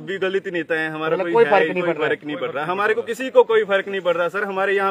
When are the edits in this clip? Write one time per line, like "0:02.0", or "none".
none